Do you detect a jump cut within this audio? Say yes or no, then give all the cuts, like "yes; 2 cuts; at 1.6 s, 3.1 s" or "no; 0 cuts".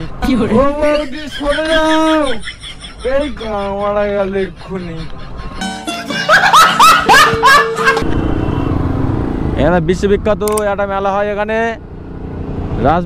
no; 0 cuts